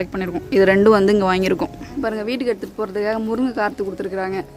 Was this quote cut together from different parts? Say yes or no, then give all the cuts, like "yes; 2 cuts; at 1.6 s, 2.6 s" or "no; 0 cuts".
yes; 1 cut; at 2.0 s